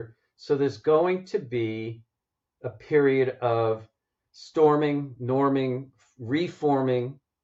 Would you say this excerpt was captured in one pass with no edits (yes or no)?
yes